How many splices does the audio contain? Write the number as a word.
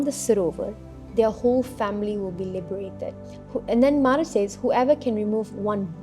one